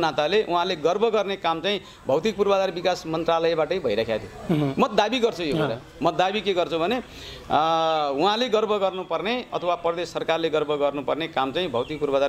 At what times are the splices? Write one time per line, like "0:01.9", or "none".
none